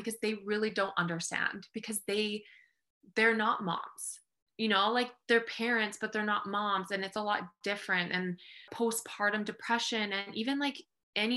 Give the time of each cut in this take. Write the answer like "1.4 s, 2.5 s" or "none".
8.7 s